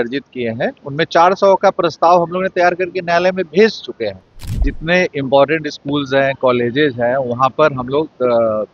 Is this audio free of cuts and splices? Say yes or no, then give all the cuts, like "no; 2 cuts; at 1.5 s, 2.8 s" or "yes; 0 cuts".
no; 1 cut; at 4.6 s